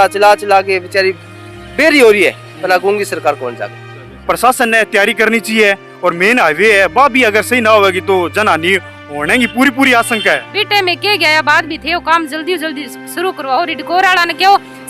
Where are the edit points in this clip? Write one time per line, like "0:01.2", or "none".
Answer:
0:04.1
0:10.5